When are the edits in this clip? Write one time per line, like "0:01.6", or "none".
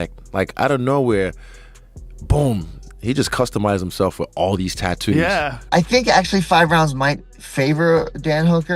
0:05.6